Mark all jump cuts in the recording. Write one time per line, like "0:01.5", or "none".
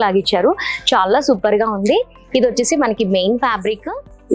none